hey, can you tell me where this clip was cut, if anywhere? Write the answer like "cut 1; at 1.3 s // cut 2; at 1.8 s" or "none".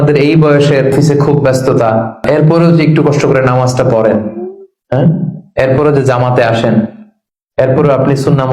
cut 1; at 0.9 s // cut 2; at 2.2 s